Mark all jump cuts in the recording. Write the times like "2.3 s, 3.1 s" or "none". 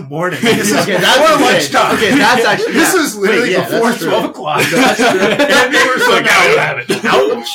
none